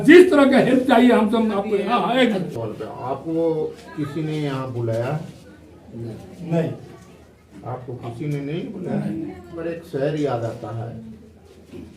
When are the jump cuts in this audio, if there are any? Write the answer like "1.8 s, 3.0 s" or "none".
1.8 s, 9.5 s